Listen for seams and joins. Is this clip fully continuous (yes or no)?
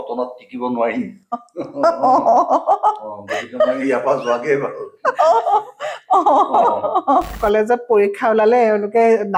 no